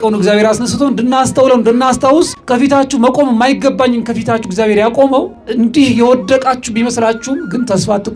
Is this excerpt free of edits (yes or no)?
yes